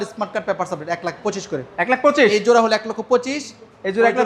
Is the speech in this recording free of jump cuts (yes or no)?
yes